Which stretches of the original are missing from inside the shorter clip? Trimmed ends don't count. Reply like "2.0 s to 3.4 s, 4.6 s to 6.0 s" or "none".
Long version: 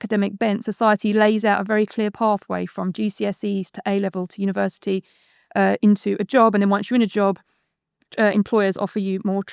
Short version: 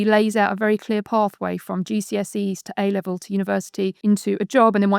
5.1 s to 5.8 s